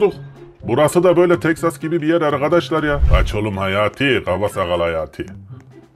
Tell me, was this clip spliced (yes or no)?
yes